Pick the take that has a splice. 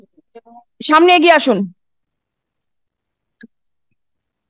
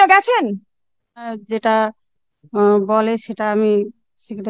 second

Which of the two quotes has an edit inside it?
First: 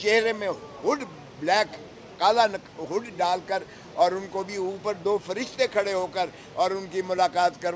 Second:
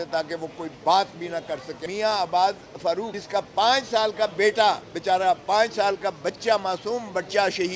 second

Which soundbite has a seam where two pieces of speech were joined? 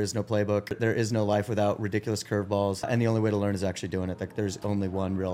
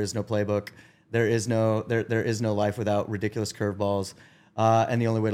first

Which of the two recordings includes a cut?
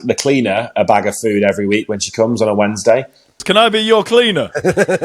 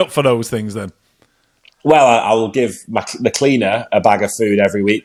first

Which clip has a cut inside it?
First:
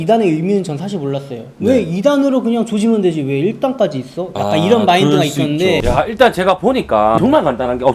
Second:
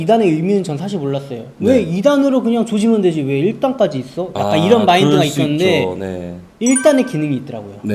first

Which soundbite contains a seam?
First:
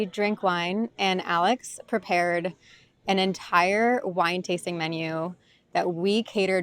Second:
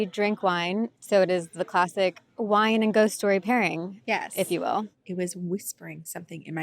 second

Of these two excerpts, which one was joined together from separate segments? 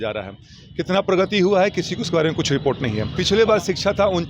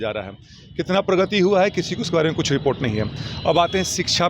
first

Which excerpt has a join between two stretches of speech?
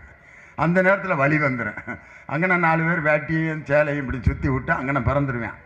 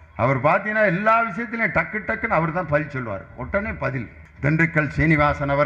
second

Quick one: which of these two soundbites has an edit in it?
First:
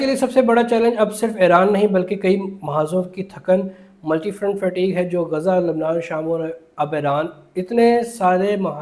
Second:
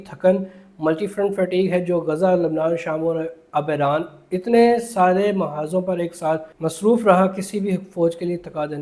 second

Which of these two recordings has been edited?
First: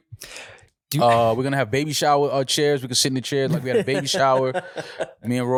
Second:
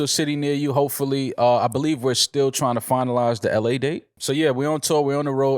second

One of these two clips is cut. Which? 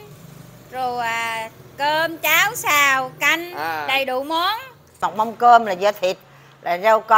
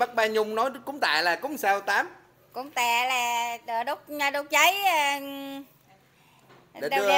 first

